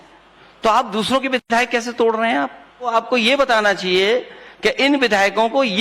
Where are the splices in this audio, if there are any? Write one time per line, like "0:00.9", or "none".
0:02.9